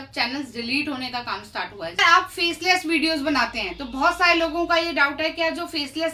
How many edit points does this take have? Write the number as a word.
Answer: one